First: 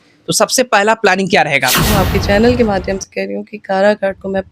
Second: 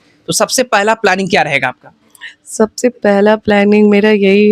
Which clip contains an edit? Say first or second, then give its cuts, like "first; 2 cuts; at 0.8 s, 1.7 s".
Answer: first; 1 cut; at 1.8 s